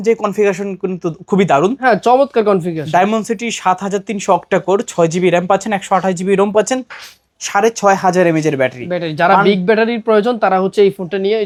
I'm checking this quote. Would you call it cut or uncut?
uncut